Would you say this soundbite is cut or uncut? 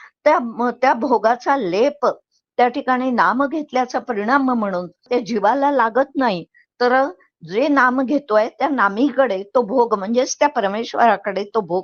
cut